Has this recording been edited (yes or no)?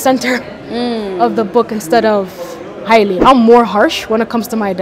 yes